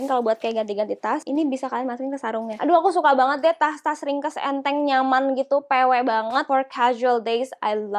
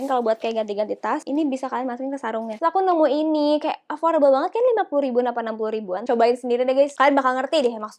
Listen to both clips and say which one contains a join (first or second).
second